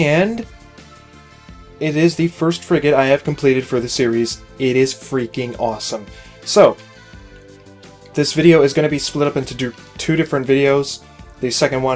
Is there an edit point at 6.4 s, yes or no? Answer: no